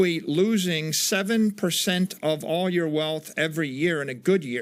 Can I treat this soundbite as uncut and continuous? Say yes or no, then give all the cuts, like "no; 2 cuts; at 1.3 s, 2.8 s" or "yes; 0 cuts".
yes; 0 cuts